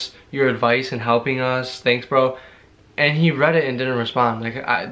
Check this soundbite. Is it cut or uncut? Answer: uncut